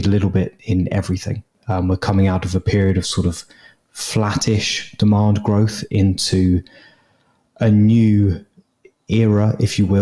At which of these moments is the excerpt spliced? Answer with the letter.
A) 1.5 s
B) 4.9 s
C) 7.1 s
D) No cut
A